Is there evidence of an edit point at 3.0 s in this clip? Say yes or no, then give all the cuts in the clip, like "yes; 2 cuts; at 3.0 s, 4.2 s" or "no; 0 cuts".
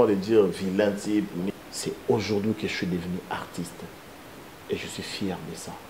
no; 1 cut; at 1.5 s